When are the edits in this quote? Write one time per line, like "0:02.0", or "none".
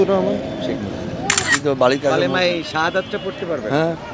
0:01.5